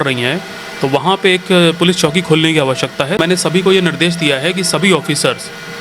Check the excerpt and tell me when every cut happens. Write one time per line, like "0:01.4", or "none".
0:03.2